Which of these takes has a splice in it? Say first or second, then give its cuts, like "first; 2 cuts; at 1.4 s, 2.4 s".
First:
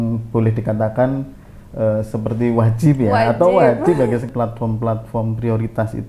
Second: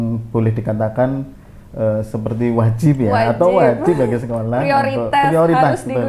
first; 1 cut; at 4.3 s